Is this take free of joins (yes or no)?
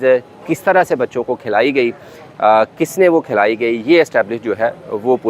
yes